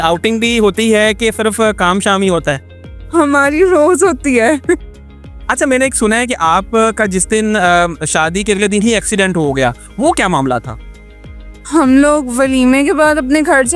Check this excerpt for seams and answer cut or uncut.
uncut